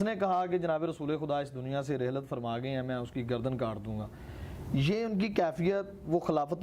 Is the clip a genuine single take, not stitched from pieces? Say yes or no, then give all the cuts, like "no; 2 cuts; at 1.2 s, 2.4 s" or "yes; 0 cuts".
yes; 0 cuts